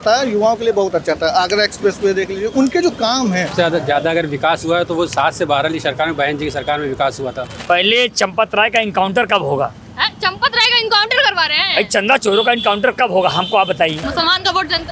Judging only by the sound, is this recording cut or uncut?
cut